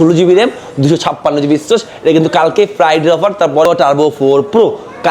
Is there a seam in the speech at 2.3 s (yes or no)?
no